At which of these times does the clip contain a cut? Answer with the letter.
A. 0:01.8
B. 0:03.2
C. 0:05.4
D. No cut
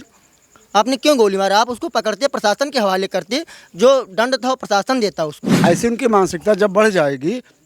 C